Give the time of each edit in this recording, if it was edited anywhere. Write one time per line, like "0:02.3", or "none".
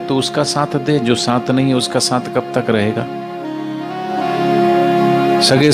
none